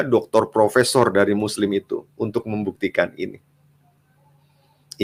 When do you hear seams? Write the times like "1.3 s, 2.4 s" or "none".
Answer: none